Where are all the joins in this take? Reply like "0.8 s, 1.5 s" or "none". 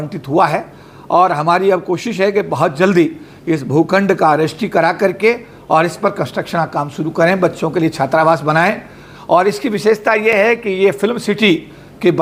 none